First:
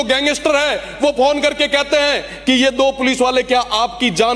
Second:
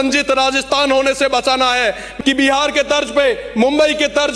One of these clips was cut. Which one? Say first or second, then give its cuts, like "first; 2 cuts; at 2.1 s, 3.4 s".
second; 1 cut; at 2.1 s